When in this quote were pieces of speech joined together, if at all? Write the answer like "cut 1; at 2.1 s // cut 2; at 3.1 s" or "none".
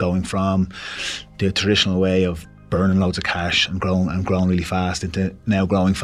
none